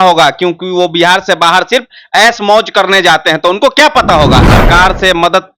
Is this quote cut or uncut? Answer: cut